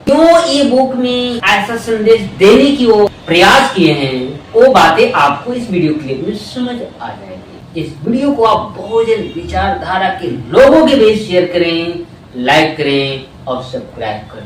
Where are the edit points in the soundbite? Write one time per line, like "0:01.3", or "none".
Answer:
0:07.7